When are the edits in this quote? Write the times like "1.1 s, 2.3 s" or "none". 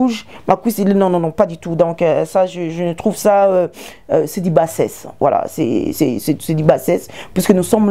none